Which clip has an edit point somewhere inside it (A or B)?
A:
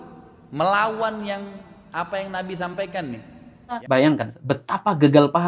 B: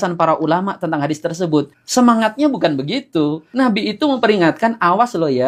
A